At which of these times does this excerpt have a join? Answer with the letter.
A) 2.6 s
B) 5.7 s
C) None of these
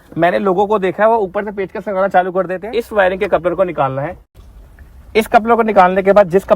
A